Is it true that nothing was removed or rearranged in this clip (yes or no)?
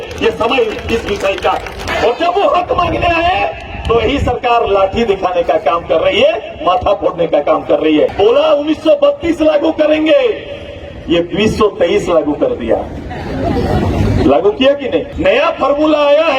no